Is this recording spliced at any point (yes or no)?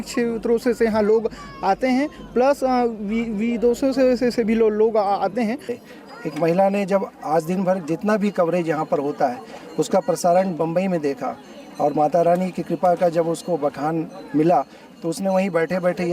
yes